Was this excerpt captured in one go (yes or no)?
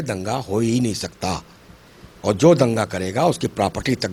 yes